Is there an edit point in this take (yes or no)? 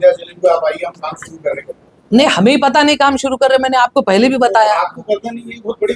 no